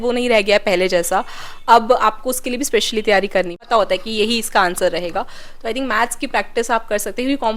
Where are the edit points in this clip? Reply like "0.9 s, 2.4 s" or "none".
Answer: 3.7 s